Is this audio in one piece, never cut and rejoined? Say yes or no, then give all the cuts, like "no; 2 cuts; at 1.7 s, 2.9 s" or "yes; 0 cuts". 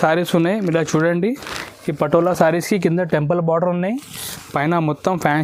yes; 0 cuts